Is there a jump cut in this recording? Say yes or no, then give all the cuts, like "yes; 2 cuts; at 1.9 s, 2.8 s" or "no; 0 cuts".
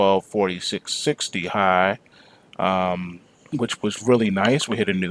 no; 0 cuts